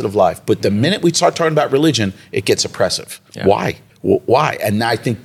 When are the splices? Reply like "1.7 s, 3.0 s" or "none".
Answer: 3.9 s